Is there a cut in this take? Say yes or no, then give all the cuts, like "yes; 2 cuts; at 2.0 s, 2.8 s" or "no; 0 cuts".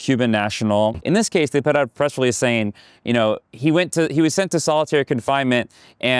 yes; 1 cut; at 1.0 s